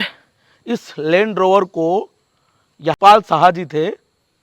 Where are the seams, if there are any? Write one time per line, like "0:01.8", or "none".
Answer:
0:03.0